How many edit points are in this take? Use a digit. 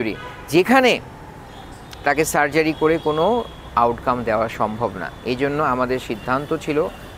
0